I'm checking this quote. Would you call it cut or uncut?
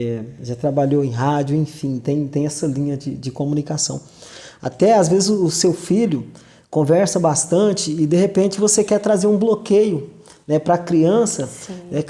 uncut